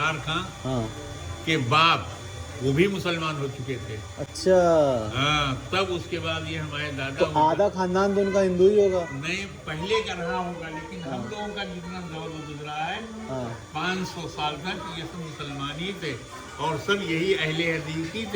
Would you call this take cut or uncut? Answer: uncut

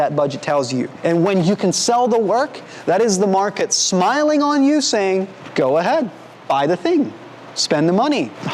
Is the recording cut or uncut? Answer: cut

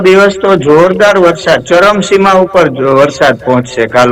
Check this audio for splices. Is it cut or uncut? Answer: uncut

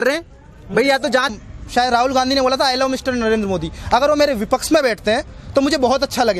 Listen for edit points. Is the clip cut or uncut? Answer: cut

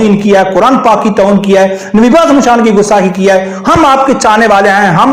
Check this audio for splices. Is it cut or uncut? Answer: uncut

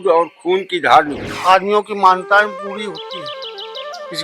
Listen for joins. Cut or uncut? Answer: cut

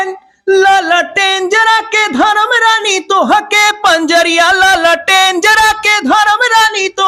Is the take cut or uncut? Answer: uncut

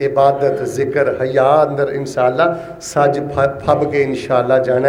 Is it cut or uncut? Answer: uncut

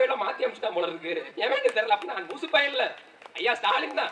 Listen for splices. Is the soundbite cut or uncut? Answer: uncut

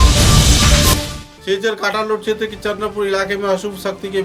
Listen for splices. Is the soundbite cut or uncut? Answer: uncut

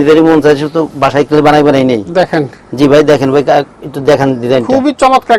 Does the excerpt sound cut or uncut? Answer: uncut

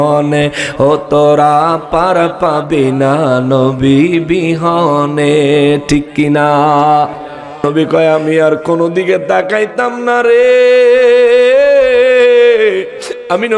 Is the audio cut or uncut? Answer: cut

